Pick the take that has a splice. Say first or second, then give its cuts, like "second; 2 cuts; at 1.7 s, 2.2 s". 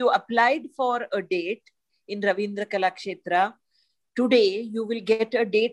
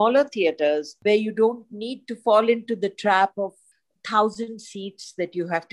second; 2 cuts; at 0.9 s, 3.6 s